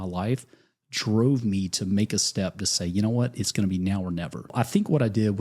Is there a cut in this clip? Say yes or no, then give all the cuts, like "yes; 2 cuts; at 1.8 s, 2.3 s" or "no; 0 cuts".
yes; 1 cut; at 4.5 s